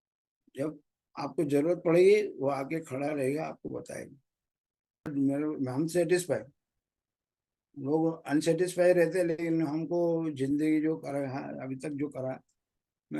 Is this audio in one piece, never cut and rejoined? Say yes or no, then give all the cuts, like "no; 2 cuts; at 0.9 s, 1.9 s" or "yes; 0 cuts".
no; 1 cut; at 5.1 s